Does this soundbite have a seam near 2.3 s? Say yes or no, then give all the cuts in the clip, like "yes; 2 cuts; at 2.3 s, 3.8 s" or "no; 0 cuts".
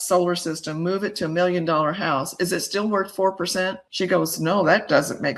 no; 0 cuts